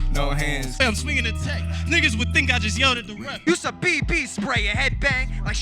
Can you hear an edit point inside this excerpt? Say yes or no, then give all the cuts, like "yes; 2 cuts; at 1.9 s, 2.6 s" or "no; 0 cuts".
yes; 2 cuts; at 0.8 s, 3.3 s